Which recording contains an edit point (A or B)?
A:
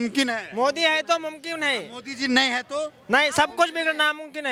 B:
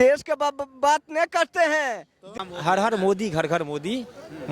B